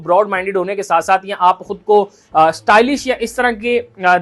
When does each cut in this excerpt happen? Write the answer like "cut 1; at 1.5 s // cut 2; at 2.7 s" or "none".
none